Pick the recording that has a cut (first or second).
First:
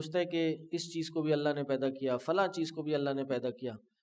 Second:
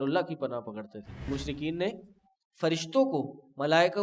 second